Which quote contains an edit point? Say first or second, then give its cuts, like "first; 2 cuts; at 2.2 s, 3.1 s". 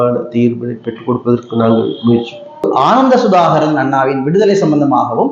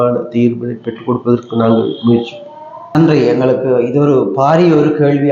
first; 1 cut; at 2.7 s